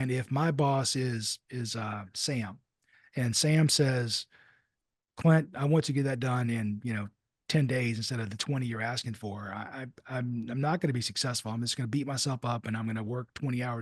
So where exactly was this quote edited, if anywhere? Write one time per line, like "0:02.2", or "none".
none